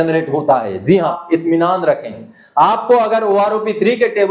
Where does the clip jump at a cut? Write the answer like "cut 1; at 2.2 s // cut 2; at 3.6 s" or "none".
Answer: cut 1; at 1.2 s